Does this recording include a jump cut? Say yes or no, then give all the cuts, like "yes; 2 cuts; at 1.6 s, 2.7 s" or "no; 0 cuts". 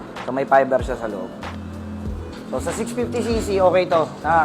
no; 0 cuts